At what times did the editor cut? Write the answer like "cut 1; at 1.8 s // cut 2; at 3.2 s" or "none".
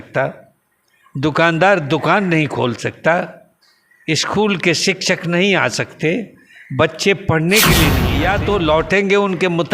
cut 1; at 8.0 s